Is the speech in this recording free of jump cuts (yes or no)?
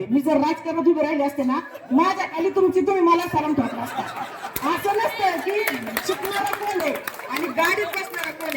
yes